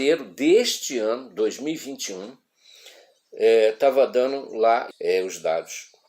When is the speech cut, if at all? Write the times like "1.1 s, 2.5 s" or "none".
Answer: 4.9 s